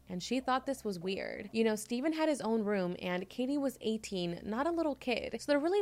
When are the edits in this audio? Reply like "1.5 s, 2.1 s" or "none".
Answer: none